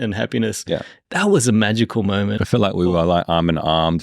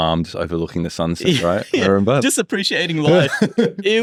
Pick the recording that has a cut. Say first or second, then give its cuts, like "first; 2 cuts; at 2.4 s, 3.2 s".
first; 2 cuts; at 0.9 s, 2.4 s